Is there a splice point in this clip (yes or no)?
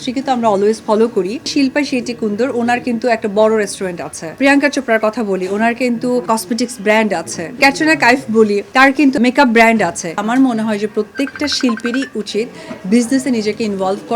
yes